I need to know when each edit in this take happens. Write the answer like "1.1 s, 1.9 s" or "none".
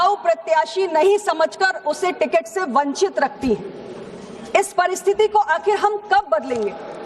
2.0 s